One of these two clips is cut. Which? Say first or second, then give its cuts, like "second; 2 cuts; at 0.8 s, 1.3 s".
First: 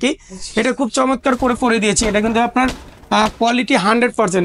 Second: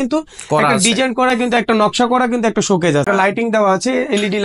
second; 1 cut; at 3.1 s